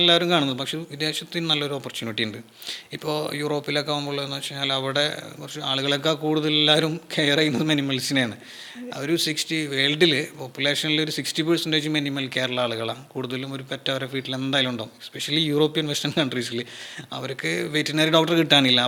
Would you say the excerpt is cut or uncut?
uncut